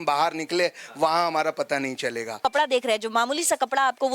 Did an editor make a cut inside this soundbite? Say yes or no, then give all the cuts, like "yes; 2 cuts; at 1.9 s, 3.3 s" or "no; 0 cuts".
yes; 1 cut; at 2.4 s